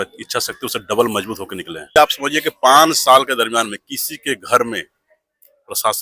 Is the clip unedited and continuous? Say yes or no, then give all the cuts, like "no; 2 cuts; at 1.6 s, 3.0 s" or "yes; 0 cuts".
no; 1 cut; at 2.0 s